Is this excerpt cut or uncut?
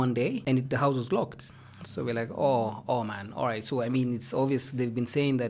uncut